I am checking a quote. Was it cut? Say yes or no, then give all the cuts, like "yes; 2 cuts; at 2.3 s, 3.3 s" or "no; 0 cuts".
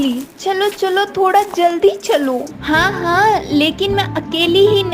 yes; 1 cut; at 2.5 s